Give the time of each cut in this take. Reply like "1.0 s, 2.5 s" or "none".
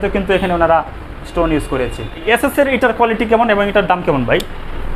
2.2 s

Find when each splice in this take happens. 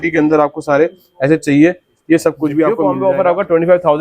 2.9 s

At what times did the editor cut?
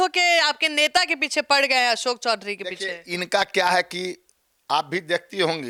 none

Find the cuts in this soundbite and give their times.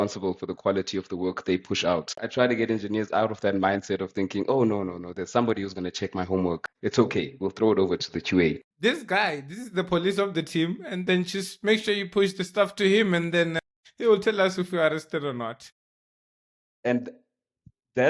2.1 s, 8.7 s

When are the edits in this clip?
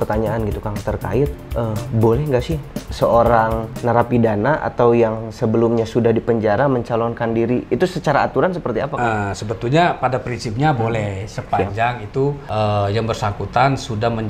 3.7 s, 12.4 s

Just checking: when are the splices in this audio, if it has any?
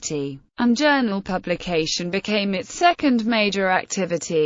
none

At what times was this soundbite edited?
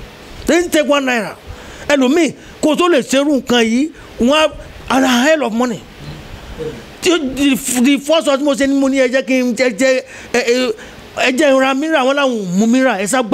none

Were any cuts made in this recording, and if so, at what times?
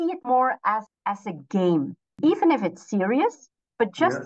0.9 s, 2.1 s

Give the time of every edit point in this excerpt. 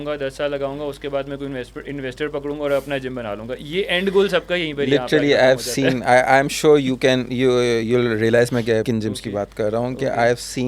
8.8 s

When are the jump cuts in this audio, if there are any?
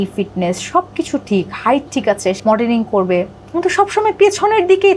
2.4 s

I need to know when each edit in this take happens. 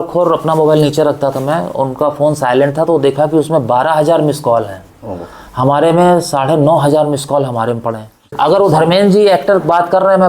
8.3 s

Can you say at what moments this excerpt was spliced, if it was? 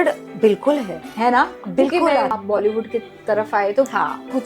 2.3 s

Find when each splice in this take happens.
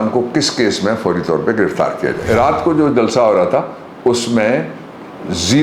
2.2 s

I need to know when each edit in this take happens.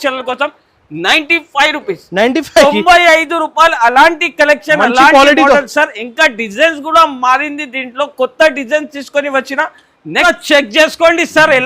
10.2 s

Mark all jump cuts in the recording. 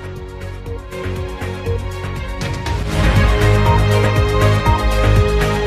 none

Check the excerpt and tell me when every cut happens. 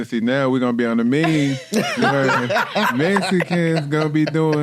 none

